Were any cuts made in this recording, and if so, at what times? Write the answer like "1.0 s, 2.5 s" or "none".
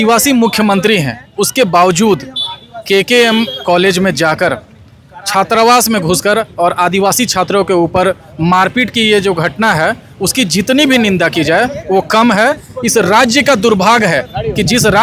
none